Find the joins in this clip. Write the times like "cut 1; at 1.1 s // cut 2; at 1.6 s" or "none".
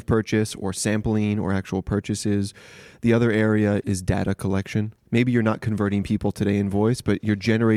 cut 1; at 3.8 s // cut 2; at 4.9 s